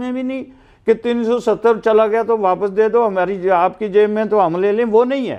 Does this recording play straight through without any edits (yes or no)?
yes